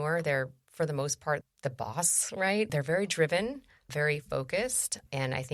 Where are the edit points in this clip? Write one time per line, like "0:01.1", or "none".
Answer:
0:01.5
0:02.7

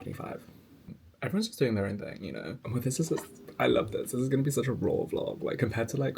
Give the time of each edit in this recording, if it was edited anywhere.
0:01.0
0:02.5

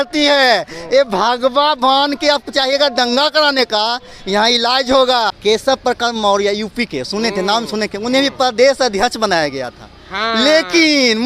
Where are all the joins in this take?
0:05.4

